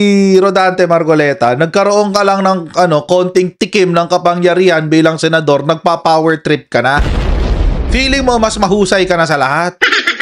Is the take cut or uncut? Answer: uncut